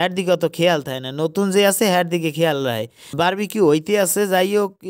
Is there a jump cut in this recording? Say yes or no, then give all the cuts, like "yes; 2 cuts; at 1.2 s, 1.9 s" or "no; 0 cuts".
no; 0 cuts